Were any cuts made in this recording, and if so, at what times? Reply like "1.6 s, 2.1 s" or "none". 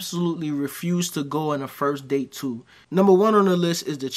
2.7 s